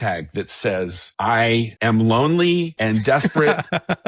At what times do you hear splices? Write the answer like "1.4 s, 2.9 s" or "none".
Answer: 1.0 s, 1.7 s, 2.7 s